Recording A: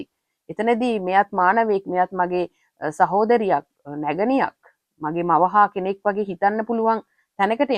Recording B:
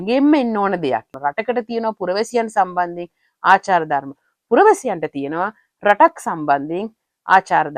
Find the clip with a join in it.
B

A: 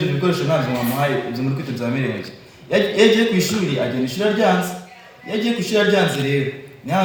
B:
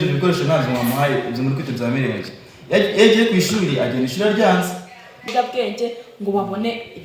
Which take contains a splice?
B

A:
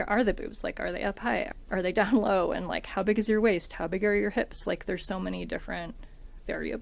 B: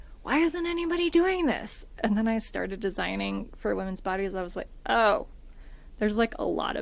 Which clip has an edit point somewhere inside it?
A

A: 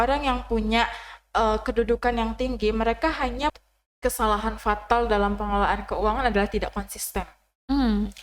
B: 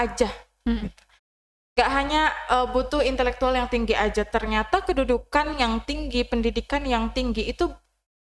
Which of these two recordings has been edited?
A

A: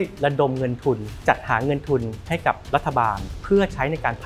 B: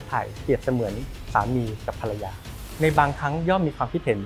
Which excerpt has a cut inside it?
A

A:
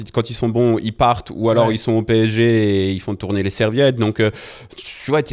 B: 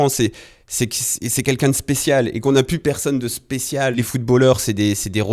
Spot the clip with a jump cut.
B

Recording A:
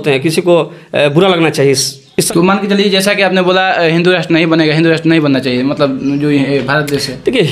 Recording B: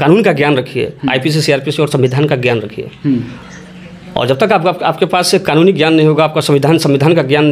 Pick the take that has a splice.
A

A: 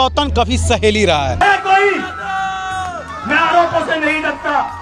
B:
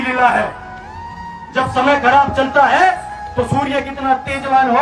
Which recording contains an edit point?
A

